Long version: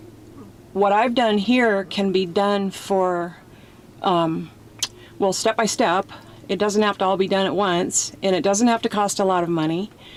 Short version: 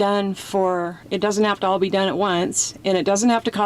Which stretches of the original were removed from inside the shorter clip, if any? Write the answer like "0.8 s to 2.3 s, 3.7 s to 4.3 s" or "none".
3.4 s to 6.4 s